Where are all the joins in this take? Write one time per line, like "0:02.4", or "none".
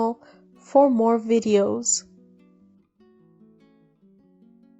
0:01.9